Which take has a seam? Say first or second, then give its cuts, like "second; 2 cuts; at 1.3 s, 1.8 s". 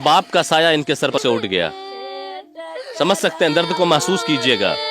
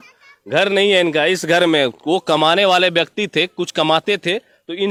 first; 1 cut; at 1.2 s